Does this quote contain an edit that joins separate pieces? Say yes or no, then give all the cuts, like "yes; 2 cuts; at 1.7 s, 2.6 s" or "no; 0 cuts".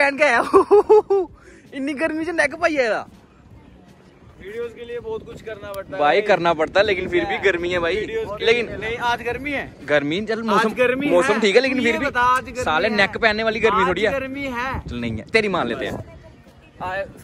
no; 0 cuts